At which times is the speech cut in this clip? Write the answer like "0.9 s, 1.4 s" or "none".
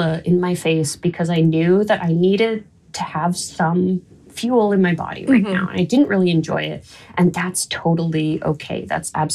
none